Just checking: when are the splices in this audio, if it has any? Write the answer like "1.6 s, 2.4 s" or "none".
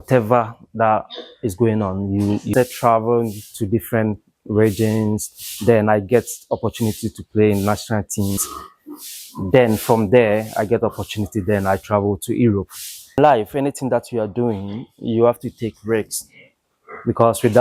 2.5 s, 8.4 s, 13.2 s